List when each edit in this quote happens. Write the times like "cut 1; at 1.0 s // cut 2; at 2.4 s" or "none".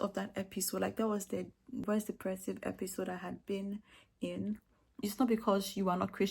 cut 1; at 1.8 s // cut 2; at 4.9 s